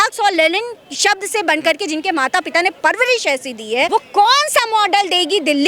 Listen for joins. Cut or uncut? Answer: cut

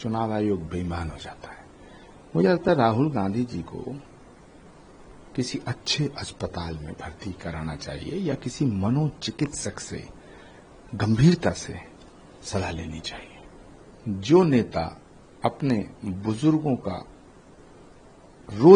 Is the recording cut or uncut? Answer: uncut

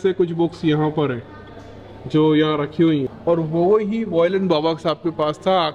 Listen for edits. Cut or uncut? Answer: cut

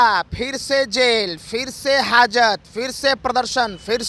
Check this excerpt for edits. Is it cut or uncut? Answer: uncut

